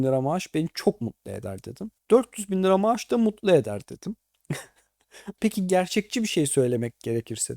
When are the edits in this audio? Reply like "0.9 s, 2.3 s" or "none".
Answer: 5.3 s